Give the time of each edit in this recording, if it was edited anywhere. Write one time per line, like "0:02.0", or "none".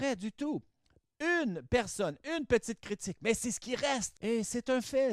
0:04.1

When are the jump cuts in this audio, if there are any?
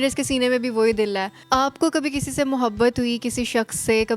0:01.3

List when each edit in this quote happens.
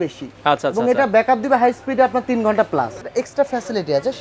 0:03.0

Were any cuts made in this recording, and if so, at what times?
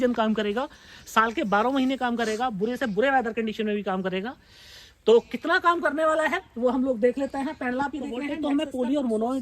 0:08.4

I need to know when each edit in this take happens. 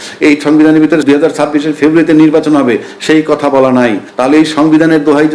0:01.0
0:04.1

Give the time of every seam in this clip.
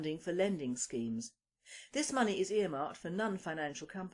0:01.1

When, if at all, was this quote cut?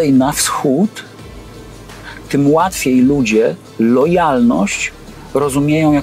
none

